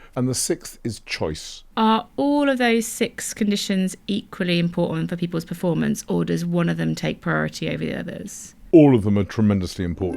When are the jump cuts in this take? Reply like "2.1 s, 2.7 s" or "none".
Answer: 1.5 s